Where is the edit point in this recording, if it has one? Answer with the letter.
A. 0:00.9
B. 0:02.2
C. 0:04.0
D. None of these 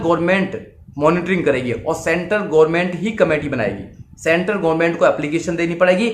D